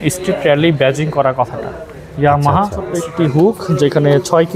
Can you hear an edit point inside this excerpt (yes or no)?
yes